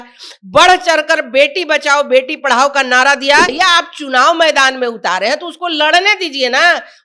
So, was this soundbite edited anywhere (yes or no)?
yes